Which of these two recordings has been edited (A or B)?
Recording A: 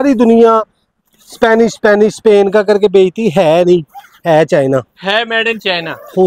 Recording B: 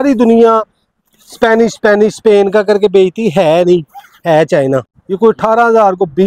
B